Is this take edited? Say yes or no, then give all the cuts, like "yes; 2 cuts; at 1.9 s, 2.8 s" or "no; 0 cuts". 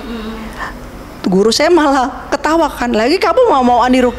no; 0 cuts